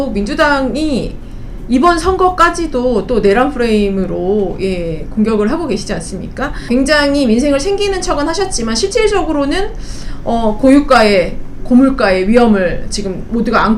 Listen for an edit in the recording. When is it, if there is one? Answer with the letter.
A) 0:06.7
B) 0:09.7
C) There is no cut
A